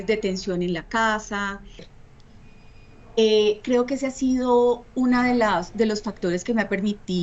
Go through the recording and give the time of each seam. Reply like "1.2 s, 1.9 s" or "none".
2.0 s